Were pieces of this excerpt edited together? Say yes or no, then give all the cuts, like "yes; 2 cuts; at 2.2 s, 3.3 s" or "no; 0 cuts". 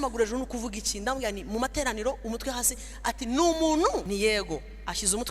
yes; 1 cut; at 4.0 s